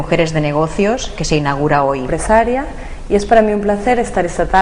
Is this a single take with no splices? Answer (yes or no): yes